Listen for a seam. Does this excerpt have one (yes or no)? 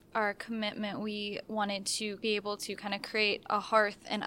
yes